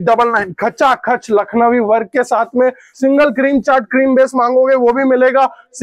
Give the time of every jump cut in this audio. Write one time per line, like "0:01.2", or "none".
0:02.9